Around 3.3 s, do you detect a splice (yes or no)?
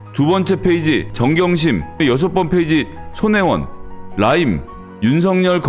no